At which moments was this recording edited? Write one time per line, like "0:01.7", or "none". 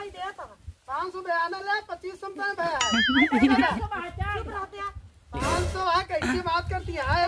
none